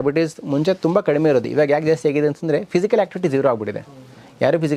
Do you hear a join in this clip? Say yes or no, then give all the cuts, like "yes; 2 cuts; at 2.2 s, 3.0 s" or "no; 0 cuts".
no; 0 cuts